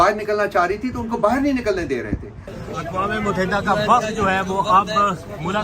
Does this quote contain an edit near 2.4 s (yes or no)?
yes